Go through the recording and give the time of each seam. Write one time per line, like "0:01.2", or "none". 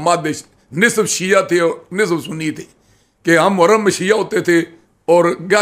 none